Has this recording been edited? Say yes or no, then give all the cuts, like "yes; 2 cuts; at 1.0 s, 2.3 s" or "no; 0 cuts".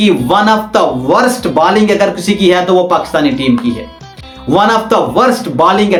no; 0 cuts